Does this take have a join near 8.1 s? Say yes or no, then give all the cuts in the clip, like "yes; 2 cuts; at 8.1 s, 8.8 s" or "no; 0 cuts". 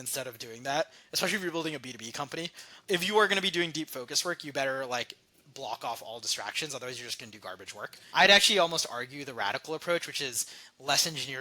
yes; 2 cuts; at 2.7 s, 8.1 s